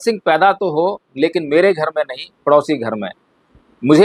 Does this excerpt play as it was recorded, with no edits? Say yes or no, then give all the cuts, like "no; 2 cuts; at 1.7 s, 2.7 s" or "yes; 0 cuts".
yes; 0 cuts